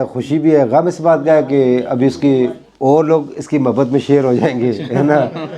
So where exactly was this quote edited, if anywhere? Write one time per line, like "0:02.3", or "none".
0:02.7